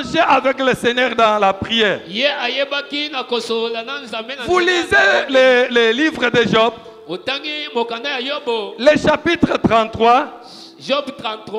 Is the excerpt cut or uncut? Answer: uncut